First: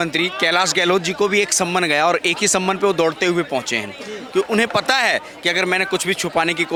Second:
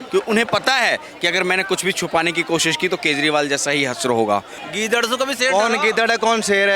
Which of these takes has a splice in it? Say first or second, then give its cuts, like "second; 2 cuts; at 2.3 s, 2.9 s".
second; 1 cut; at 4.6 s